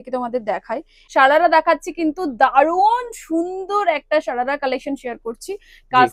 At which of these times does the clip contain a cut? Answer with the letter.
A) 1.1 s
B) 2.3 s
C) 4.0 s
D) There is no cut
A